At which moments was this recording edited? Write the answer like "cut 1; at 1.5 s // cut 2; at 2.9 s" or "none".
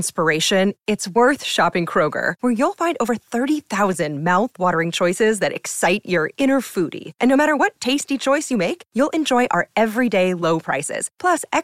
none

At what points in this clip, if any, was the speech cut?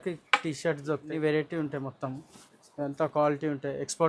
cut 1; at 1.1 s

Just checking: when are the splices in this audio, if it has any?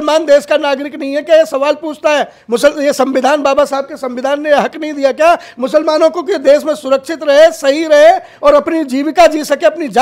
none

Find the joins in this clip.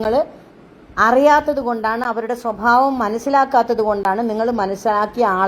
none

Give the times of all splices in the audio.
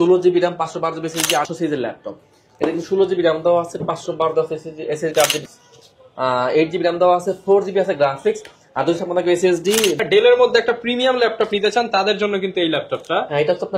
cut 1; at 1.5 s // cut 2; at 5.4 s // cut 3; at 10.0 s

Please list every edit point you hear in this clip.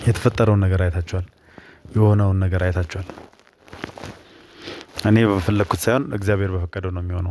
none

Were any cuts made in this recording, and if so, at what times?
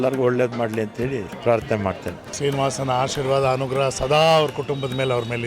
cut 1; at 1.3 s // cut 2; at 2.3 s

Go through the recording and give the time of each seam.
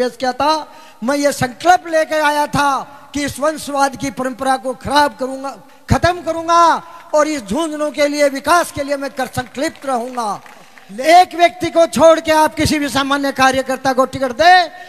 cut 1; at 10.8 s

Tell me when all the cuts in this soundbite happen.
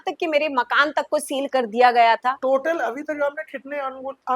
cut 1; at 2.4 s

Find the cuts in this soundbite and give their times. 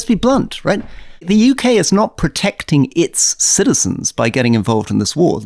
cut 1; at 0.9 s

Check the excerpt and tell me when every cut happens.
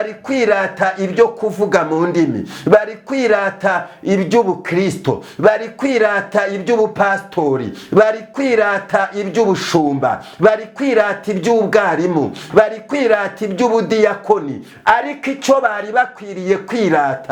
none

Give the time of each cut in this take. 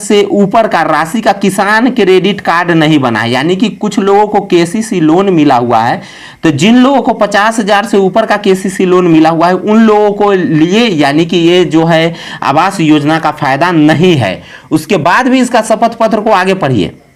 none

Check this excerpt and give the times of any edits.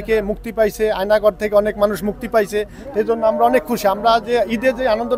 none

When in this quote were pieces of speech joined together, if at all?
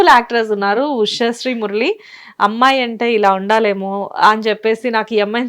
none

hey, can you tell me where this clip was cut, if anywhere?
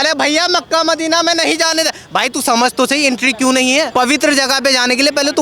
cut 1; at 3.9 s

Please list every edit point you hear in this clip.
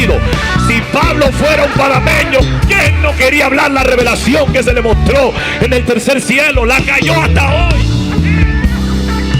none

